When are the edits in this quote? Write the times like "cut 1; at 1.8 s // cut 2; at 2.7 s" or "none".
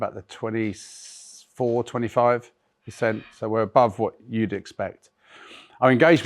none